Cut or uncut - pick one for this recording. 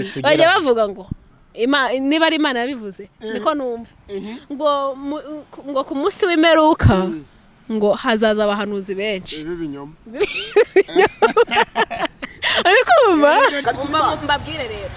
cut